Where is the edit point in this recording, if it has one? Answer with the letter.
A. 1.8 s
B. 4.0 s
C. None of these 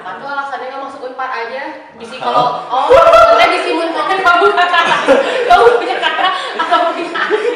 B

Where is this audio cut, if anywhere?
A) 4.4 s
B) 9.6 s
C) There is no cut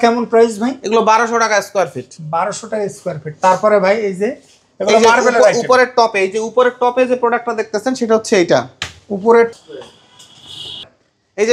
B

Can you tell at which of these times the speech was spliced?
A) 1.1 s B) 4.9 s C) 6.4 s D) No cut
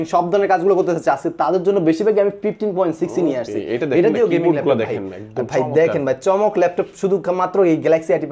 D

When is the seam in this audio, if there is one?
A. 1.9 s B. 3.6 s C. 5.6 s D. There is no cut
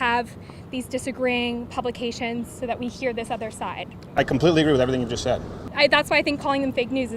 C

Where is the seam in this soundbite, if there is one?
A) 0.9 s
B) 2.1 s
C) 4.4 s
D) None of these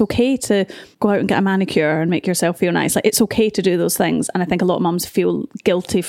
A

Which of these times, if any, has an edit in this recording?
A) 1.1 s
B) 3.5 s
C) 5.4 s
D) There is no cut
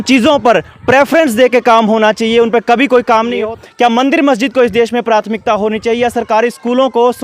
B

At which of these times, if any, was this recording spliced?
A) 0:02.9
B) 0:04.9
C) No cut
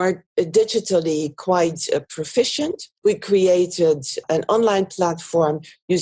A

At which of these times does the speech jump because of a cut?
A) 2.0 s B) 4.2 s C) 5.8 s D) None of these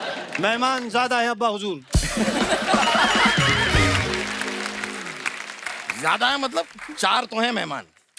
D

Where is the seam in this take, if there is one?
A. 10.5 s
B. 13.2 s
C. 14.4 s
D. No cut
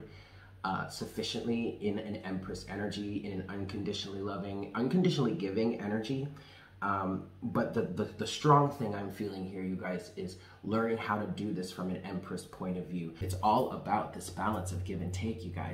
B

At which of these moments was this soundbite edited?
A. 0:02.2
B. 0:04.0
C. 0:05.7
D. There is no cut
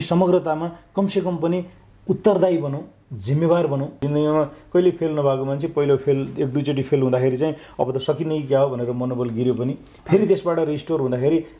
B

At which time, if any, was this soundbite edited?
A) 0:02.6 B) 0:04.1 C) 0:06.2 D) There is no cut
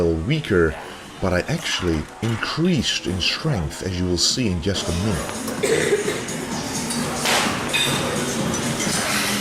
A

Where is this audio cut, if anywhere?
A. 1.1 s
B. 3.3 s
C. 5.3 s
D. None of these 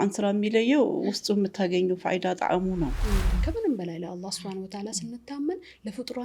B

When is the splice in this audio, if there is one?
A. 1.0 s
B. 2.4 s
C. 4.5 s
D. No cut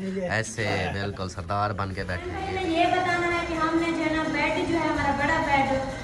B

